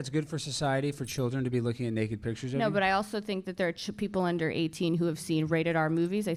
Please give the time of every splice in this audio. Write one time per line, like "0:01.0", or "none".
none